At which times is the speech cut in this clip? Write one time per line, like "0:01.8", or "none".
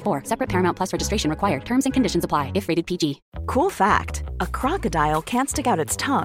none

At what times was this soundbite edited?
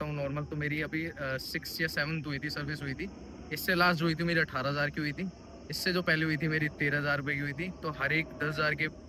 none

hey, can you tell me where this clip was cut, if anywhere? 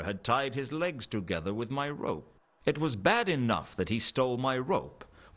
none

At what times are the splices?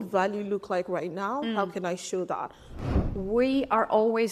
0:02.7

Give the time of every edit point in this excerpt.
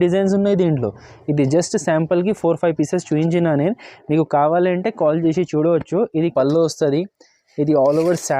0:06.3

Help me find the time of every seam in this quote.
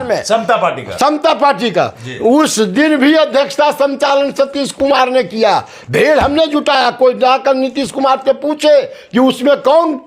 none

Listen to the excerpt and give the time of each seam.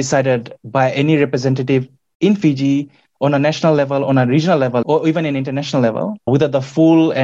0:04.8
0:06.3

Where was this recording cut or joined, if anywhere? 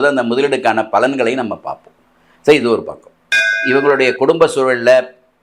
0:03.5

